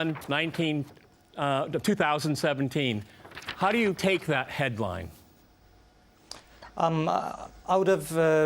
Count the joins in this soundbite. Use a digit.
1